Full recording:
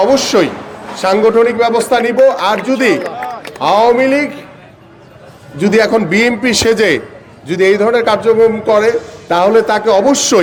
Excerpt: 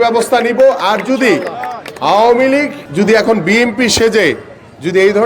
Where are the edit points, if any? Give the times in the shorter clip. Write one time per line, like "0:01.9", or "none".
0:02.8